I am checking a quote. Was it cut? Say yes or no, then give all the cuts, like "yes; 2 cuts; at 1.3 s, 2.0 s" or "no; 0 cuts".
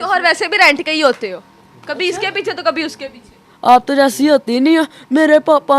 no; 0 cuts